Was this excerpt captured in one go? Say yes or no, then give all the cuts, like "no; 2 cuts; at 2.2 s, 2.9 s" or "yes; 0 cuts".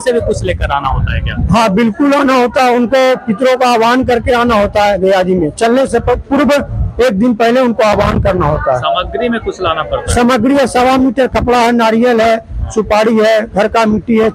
yes; 0 cuts